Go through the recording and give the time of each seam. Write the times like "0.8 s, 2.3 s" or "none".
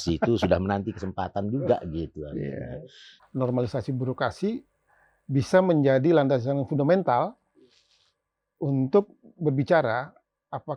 3.1 s